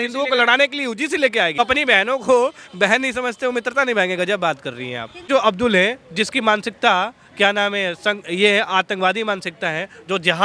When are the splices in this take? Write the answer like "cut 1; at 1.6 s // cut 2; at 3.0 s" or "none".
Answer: cut 1; at 1.6 s // cut 2; at 5.2 s